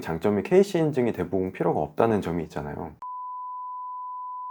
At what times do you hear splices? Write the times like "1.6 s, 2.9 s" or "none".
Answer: none